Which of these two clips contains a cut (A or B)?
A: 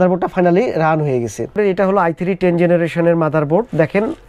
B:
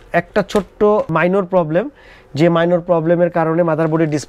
A